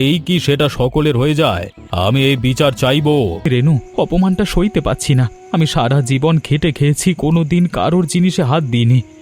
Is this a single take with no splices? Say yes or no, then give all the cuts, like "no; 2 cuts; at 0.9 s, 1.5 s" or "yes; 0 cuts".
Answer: no; 1 cut; at 3.4 s